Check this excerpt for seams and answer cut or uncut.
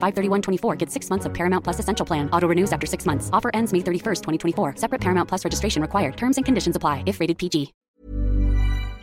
cut